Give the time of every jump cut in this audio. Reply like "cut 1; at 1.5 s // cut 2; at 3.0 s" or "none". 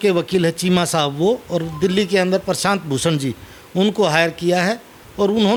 none